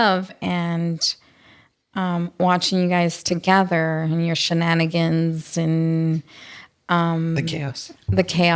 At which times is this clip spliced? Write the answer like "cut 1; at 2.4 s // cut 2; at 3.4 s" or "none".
none